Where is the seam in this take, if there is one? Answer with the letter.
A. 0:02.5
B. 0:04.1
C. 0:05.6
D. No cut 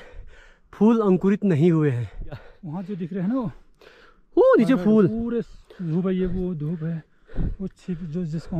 A